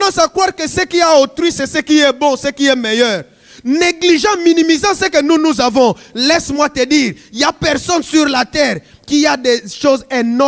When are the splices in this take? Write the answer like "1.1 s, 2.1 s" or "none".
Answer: none